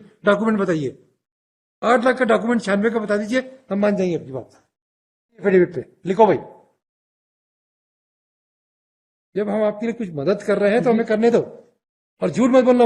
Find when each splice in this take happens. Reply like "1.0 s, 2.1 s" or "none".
5.4 s